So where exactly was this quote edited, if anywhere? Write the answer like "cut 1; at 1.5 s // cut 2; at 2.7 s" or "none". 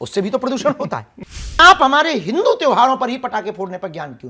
cut 1; at 1.6 s